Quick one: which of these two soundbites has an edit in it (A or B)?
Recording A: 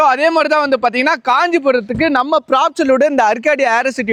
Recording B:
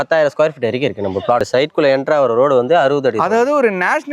B